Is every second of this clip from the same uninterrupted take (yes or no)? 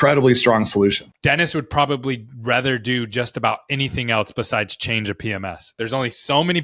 no